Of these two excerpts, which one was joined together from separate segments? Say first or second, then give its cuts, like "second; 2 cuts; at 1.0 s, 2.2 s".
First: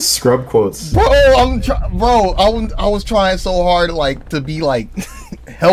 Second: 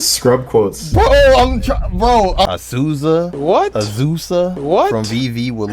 second; 1 cut; at 2.4 s